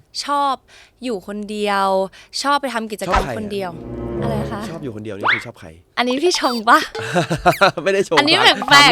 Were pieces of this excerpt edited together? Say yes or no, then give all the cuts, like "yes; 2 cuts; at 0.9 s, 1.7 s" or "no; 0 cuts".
no; 0 cuts